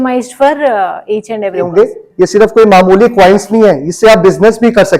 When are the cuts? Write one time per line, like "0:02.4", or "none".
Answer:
0:01.7